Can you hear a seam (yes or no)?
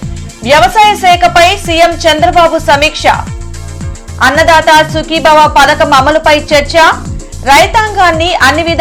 no